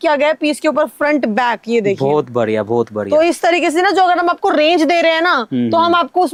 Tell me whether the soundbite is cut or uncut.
uncut